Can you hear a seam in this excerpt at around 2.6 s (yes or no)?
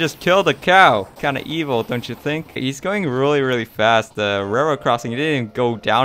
yes